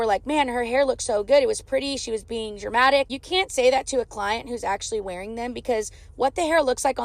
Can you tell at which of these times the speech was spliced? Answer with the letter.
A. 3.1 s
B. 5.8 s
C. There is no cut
A